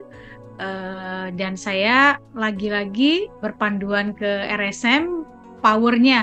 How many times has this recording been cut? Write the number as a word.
two